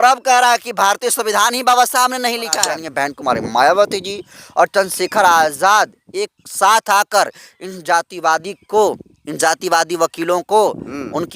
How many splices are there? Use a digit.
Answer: 1